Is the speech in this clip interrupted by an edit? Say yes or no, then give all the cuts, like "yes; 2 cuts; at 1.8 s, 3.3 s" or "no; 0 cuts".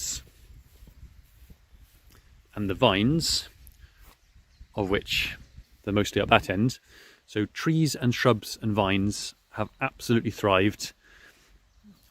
yes; 1 cut; at 5.6 s